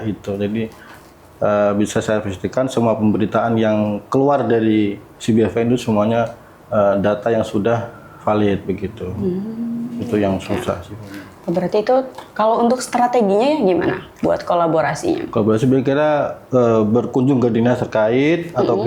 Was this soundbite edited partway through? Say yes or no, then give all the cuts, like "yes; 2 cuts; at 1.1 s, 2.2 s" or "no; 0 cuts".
no; 0 cuts